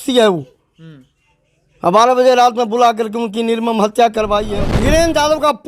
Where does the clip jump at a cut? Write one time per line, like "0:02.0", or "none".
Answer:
0:04.8